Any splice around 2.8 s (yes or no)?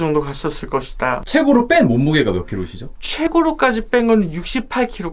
no